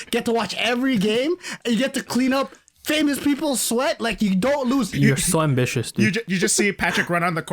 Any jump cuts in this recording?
yes; 2 cuts; at 4.9 s, 6.2 s

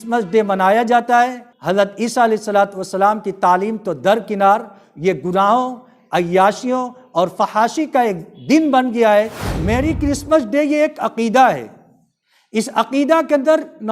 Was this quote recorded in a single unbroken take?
no; 2 cuts; at 1.5 s, 9.4 s

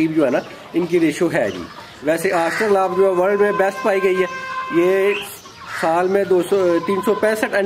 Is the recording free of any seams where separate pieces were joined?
yes; 0 cuts

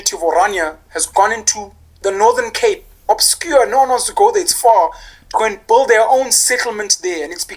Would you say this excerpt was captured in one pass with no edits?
yes; 0 cuts

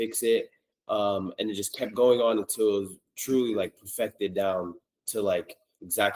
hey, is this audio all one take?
yes; 0 cuts

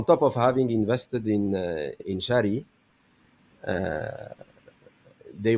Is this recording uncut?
no; 1 cut; at 2.0 s

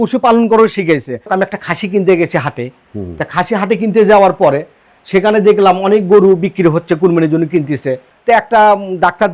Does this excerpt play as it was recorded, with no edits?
no; 1 cut; at 1.3 s

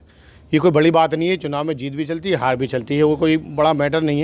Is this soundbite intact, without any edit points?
yes; 0 cuts

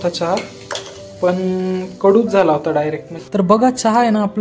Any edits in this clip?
yes; 1 cut; at 3.2 s

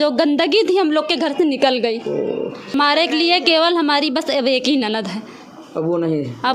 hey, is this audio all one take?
no; 1 cut; at 2.7 s

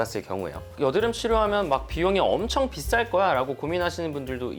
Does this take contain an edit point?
no; 0 cuts

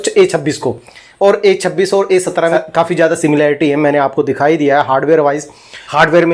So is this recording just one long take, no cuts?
yes; 0 cuts

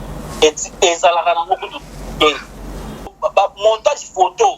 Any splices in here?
yes; 1 cut; at 3.1 s

